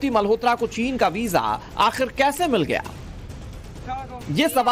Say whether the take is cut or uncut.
uncut